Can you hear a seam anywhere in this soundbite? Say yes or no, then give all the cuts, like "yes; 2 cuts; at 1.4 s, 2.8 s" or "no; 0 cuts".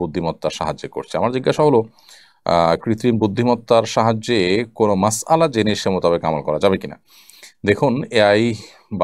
no; 0 cuts